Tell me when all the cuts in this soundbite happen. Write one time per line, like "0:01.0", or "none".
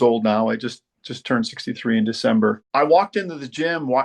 0:02.6